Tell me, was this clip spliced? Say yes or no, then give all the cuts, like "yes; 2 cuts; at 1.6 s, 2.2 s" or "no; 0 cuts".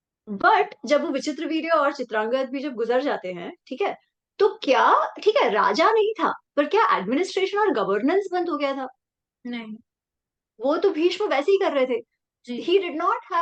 no; 0 cuts